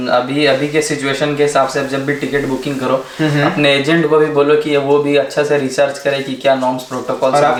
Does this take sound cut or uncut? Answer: uncut